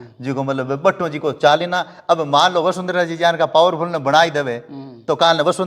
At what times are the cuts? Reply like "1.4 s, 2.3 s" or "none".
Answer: none